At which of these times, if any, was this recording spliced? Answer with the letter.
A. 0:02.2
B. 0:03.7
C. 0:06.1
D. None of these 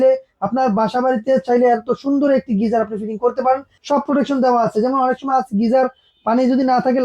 B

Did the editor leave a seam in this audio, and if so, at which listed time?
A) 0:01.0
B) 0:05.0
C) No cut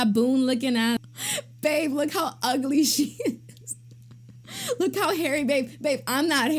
A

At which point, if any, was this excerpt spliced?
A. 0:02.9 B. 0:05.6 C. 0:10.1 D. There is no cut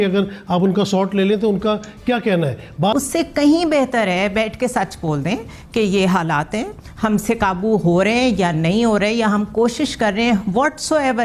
A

